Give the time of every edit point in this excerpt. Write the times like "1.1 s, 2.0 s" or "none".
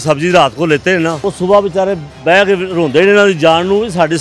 1.2 s